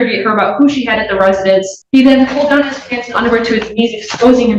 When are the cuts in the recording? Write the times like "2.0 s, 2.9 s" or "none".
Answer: 1.8 s